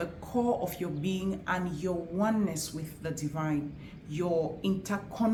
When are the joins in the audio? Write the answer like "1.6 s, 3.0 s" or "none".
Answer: none